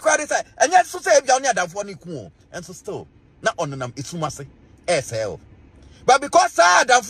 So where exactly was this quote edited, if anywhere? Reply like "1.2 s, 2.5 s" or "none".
none